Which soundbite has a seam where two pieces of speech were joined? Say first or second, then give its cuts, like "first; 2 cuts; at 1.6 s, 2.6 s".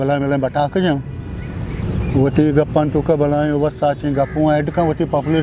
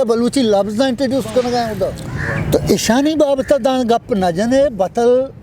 second; 1 cut; at 2.1 s